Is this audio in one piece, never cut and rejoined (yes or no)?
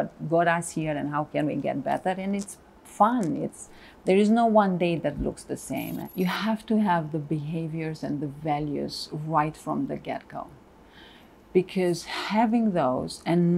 no